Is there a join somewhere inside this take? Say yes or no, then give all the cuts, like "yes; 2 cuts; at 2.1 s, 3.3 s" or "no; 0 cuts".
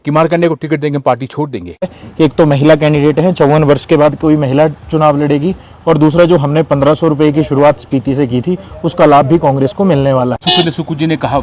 yes; 2 cuts; at 2.0 s, 10.4 s